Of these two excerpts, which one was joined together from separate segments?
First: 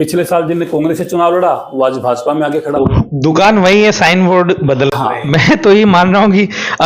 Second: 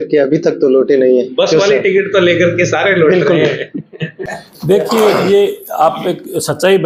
first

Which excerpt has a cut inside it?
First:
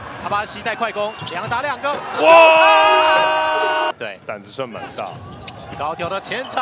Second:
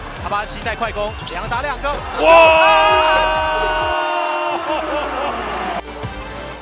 first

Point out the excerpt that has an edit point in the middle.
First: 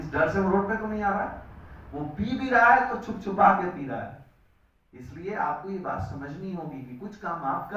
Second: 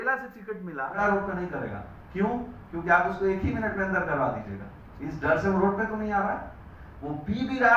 second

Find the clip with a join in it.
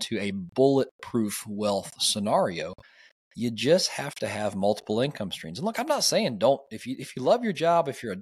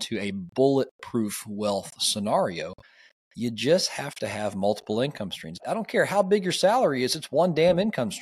second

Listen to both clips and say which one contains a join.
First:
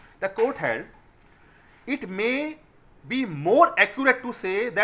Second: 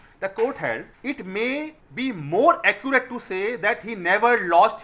second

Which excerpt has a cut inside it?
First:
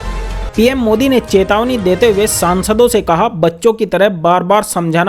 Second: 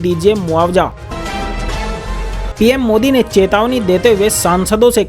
second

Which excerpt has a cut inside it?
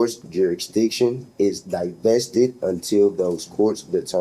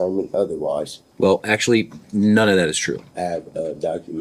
second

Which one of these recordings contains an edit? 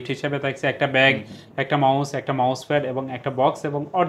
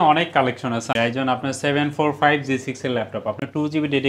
second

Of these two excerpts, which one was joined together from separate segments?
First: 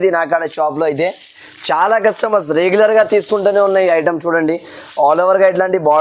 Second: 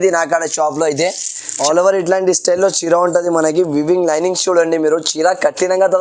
second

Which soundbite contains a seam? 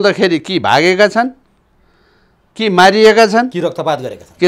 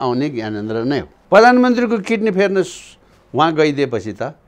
second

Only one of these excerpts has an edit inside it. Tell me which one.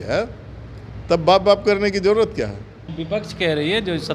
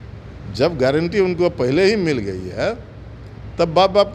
first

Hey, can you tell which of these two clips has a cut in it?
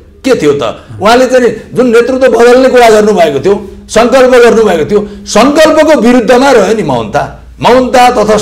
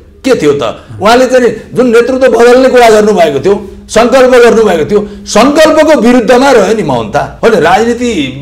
second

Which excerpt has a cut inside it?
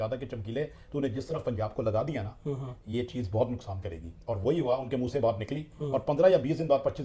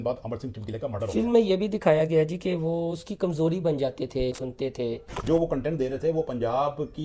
second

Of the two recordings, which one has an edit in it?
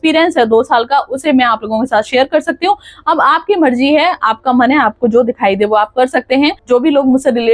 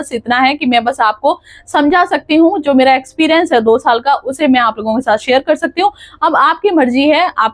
first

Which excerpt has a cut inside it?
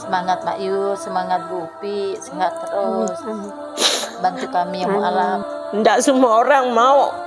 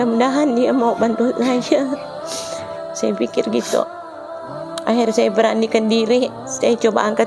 first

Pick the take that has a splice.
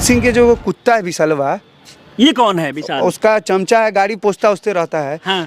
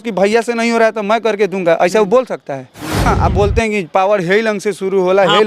second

